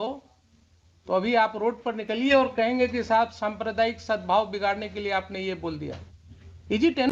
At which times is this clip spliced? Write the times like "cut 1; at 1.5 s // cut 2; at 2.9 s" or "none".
none